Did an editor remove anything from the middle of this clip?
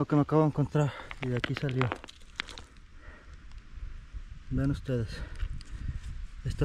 no; 0 cuts

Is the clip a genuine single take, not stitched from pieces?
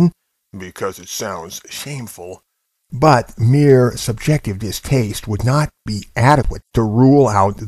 no; 1 cut; at 6.5 s

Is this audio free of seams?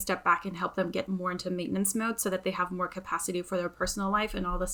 yes; 0 cuts

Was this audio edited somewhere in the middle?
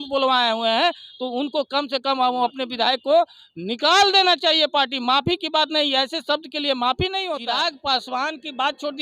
yes; 1 cut; at 7.4 s

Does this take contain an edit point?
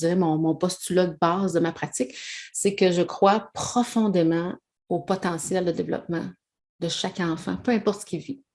no; 0 cuts

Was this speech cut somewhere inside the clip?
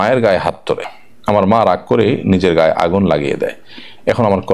yes; 1 cut; at 0.9 s

